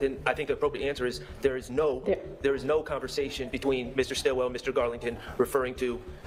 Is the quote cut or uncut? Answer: uncut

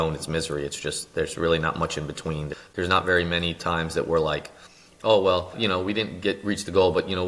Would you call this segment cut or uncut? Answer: cut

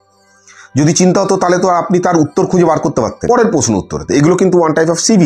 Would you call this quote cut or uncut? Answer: cut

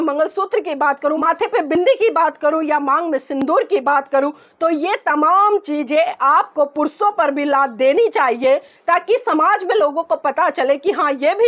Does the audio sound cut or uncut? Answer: cut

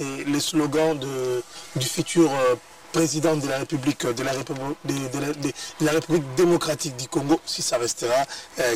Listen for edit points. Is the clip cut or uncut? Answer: uncut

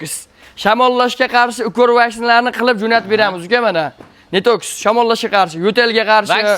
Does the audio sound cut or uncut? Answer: uncut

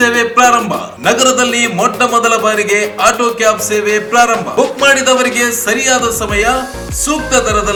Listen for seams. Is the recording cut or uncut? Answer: uncut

